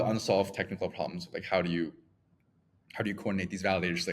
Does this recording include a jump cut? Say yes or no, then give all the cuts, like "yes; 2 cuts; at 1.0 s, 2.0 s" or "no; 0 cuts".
no; 0 cuts